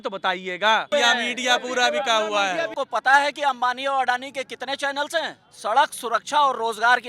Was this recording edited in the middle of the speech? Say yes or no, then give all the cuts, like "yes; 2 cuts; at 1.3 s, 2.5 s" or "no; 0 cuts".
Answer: yes; 3 cuts; at 0.9 s, 2.7 s, 5.4 s